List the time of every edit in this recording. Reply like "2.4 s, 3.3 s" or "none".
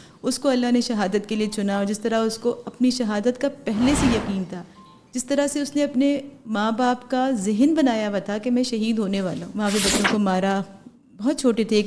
9.4 s